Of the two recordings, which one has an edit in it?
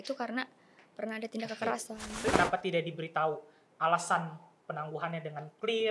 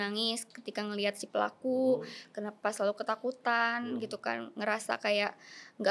first; 1 cut; at 2.3 s

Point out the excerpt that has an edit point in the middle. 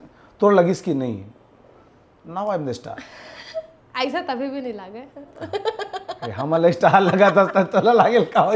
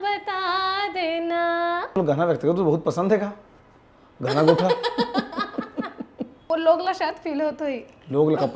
second; 2 cuts; at 2.0 s, 6.5 s

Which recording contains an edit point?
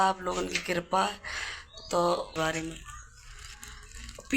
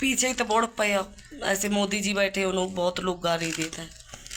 first; 1 cut; at 2.3 s

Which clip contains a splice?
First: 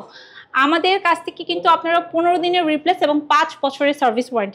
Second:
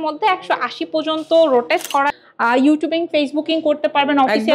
second; 1 cut; at 2.1 s

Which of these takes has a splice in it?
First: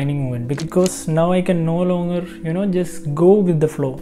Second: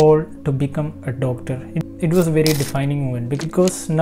second; 1 cut; at 1.8 s

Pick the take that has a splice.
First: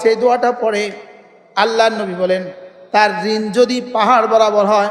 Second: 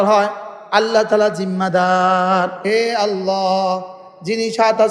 second; 1 cut; at 2.6 s

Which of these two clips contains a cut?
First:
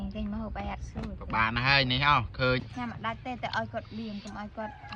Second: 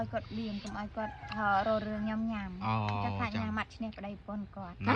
first; 1 cut; at 2.5 s

